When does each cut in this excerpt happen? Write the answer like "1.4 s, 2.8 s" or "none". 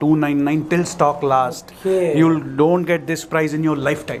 none